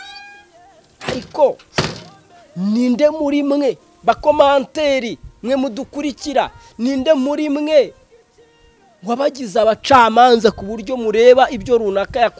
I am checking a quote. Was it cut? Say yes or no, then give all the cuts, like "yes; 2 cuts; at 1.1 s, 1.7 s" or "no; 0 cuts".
no; 0 cuts